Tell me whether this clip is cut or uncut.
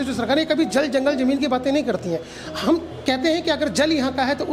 uncut